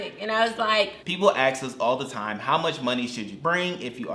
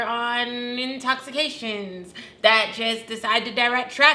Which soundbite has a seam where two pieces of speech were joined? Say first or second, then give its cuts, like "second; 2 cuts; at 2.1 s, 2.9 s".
first; 1 cut; at 1.0 s